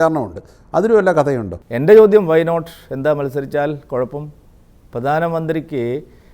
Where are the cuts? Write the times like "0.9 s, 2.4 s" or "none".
1.5 s

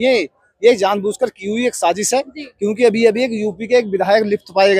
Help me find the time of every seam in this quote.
none

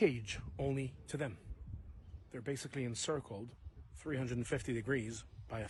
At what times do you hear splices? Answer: none

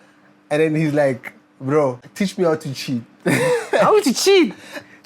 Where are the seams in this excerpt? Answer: 2.0 s

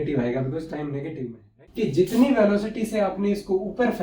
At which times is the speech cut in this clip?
1.5 s

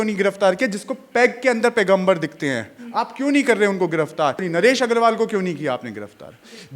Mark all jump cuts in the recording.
4.4 s

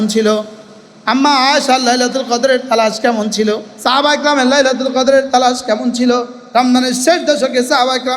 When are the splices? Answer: 3.7 s, 6.4 s

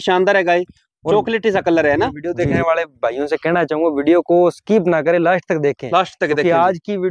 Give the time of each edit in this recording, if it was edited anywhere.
2.6 s

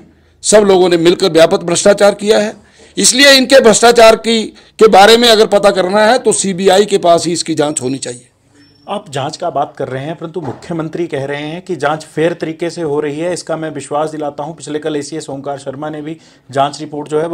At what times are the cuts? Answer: none

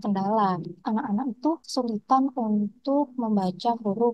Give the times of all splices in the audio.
0.8 s, 1.6 s

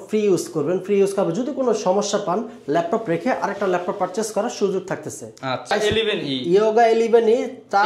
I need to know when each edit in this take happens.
5.7 s

